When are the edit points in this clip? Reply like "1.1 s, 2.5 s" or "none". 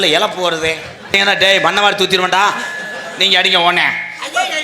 1.1 s

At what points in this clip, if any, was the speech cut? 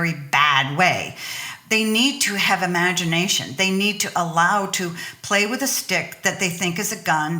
1.5 s

